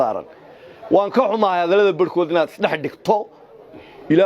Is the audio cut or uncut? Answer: uncut